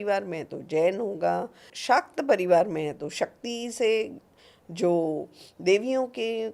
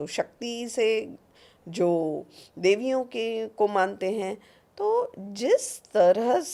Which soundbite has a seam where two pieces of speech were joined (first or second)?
first